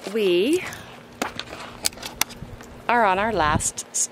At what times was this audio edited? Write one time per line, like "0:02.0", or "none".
none